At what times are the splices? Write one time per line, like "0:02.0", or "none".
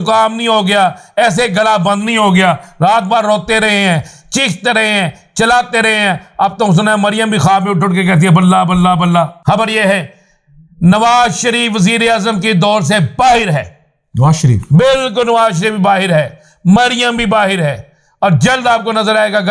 0:09.4